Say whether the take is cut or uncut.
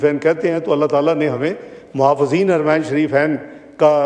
uncut